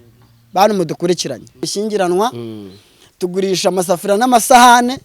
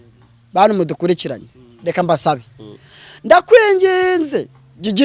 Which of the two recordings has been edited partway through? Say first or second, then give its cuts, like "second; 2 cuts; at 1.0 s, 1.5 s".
first; 1 cut; at 1.7 s